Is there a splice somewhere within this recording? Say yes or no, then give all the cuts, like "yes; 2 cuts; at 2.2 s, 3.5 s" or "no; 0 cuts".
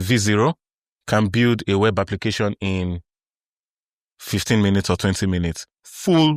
no; 0 cuts